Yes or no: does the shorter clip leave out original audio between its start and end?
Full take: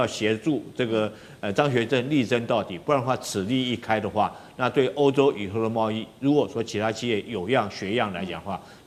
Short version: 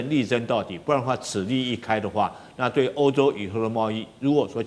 no